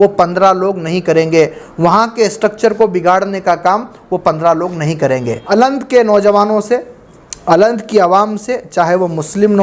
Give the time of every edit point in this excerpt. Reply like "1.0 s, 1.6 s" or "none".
5.4 s